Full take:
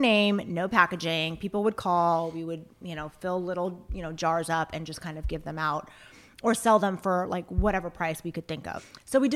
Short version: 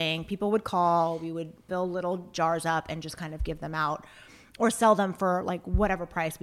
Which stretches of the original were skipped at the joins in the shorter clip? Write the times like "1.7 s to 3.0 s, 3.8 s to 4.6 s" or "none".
2.7 s to 3.1 s, 3.8 s to 4.1 s